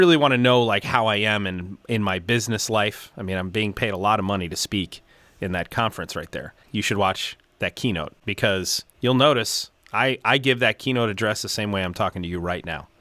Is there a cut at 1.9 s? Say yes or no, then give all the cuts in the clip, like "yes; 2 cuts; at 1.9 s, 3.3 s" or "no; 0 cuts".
no; 2 cuts; at 6.6 s, 8.5 s